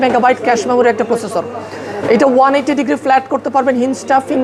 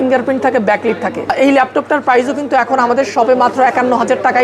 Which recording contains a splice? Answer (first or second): second